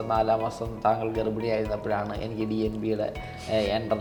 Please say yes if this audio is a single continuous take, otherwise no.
yes